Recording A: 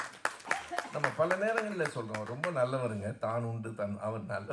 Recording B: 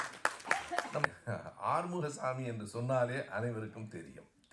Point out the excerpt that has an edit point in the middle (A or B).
B